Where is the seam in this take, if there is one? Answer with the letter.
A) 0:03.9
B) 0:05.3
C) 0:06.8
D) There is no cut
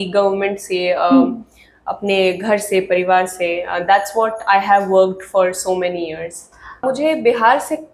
C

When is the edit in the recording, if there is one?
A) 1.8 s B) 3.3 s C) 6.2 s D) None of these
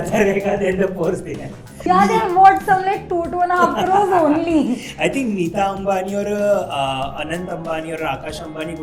A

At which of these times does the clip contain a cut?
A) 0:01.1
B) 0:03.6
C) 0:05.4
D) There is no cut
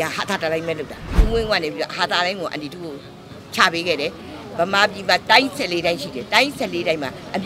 A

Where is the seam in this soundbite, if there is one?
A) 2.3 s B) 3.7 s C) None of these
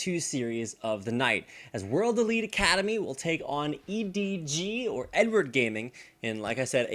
B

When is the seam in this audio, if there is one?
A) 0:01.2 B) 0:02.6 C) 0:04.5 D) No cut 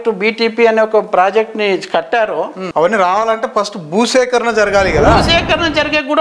B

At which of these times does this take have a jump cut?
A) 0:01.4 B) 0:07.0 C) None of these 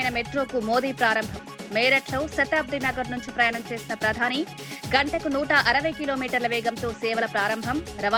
C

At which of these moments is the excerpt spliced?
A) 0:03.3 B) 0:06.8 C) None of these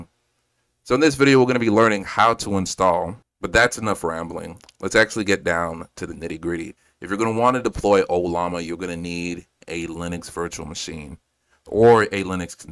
A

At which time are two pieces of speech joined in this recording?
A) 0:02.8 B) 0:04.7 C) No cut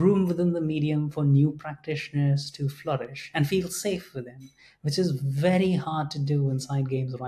C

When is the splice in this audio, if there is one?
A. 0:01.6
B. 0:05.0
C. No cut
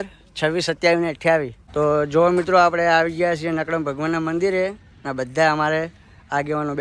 A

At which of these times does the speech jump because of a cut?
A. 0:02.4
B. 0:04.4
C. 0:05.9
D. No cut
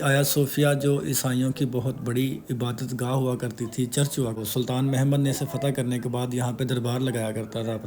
B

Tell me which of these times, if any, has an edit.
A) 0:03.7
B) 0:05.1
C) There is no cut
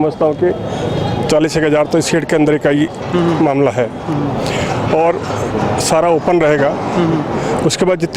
C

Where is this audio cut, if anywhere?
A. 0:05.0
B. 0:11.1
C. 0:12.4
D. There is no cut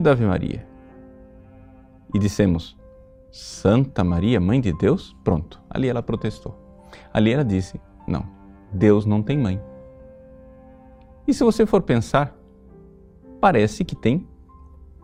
D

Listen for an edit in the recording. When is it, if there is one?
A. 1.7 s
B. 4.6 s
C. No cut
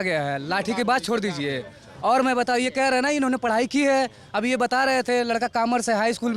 C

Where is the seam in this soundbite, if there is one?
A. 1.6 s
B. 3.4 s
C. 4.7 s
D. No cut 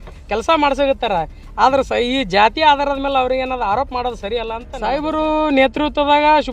C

